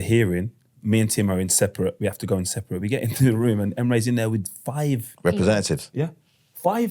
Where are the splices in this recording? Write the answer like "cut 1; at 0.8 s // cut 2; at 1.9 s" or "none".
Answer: cut 1; at 5.1 s